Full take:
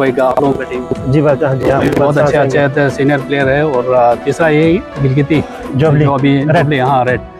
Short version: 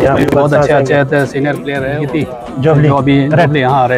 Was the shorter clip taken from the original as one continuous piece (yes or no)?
no